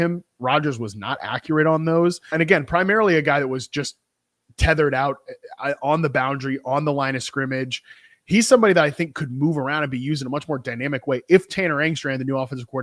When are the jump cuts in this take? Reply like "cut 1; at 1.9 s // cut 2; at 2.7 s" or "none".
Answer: cut 1; at 2.3 s